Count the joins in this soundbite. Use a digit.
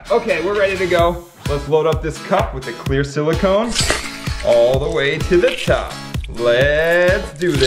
0